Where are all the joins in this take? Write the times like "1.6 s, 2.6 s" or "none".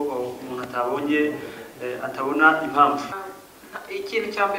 3.1 s